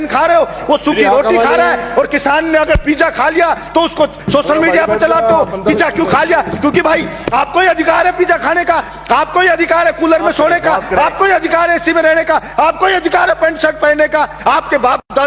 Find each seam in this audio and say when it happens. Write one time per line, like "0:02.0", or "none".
none